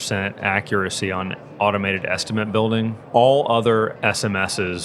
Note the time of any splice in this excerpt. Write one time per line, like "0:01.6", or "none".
0:03.0
0:04.0